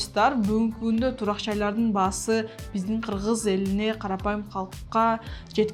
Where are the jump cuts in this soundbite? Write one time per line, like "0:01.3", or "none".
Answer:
none